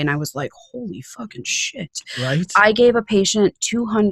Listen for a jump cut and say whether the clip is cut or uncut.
uncut